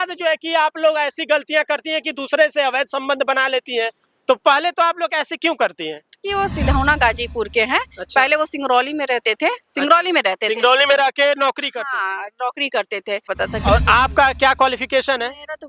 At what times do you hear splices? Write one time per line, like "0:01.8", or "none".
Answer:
0:06.2
0:13.2